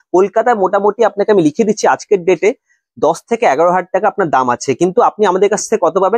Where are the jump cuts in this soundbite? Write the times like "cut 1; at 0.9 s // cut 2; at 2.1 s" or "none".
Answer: none